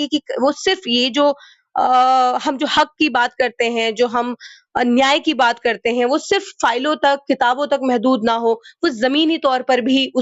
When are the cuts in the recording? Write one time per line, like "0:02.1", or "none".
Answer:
none